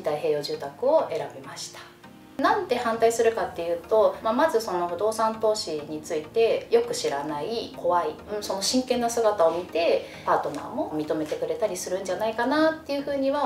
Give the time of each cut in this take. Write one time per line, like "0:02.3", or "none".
0:02.4
0:08.3
0:10.9